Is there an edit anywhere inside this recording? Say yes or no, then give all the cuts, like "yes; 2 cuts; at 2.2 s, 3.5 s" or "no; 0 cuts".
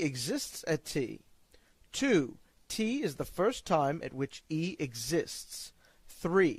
yes; 1 cut; at 3.4 s